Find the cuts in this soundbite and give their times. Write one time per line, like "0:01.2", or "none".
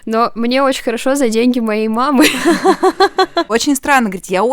0:02.4
0:03.5